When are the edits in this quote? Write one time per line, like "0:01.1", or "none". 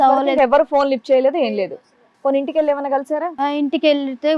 none